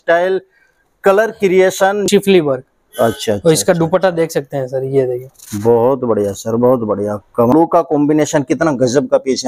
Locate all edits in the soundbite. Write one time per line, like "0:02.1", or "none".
0:02.1
0:07.5